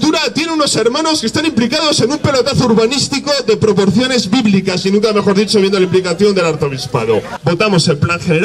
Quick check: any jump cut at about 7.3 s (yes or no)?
yes